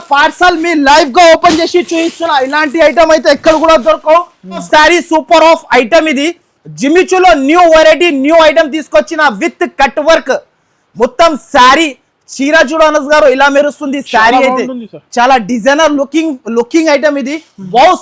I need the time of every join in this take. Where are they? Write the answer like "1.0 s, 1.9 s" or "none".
4.6 s